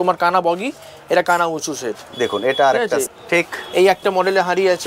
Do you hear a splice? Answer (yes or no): yes